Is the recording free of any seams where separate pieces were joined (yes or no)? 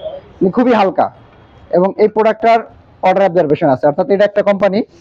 yes